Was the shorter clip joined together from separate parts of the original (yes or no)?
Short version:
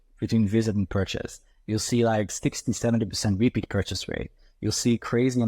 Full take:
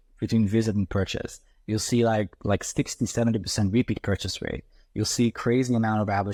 yes